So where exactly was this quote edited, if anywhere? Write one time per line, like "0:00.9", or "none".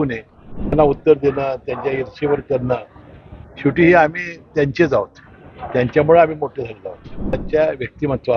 0:00.7
0:07.4